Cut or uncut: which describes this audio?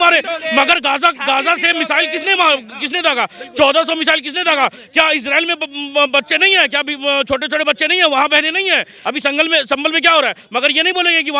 cut